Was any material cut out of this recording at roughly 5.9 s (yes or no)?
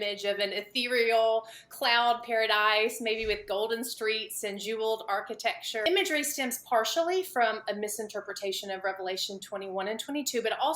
yes